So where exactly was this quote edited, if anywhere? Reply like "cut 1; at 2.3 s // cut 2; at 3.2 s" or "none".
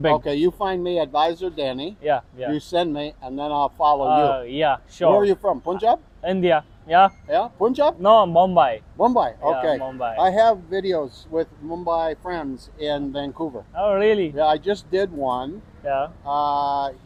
none